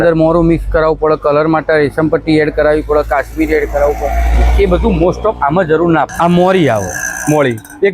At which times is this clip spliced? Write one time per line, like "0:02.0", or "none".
0:06.1